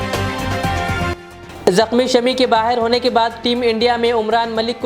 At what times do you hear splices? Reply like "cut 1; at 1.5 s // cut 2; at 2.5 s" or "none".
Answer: cut 1; at 1.1 s